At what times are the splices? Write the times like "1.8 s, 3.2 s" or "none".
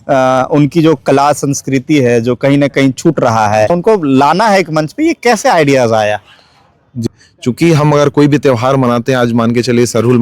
3.7 s, 7.0 s